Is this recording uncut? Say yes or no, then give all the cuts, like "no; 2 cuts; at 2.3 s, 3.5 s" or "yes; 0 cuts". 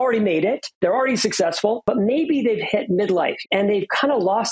no; 2 cuts; at 1.8 s, 3.4 s